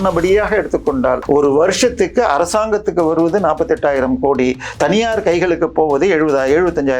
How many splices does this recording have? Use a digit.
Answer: 1